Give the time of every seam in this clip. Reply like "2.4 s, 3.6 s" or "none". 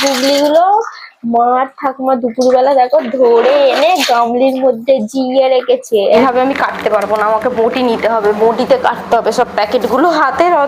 6.2 s